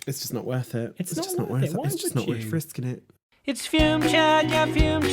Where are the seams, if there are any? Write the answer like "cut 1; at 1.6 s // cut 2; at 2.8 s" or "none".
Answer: cut 1; at 3.1 s